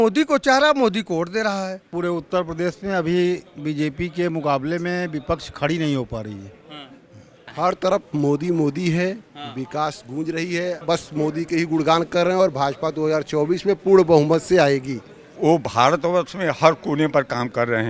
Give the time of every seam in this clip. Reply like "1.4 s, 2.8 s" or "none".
1.9 s, 7.4 s, 10.8 s, 15.3 s